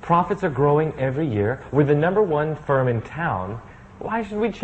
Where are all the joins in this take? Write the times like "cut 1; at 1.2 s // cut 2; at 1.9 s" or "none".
cut 1; at 1.6 s